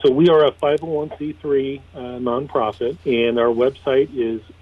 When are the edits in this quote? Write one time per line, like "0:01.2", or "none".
0:03.0